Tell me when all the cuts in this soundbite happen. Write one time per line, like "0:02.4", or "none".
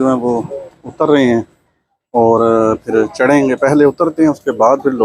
none